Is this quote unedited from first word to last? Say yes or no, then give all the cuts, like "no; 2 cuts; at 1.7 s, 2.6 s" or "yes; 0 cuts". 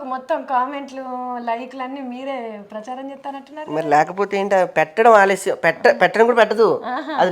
yes; 0 cuts